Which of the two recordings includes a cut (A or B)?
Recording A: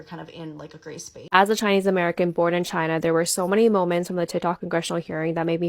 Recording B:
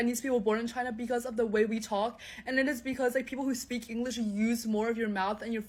A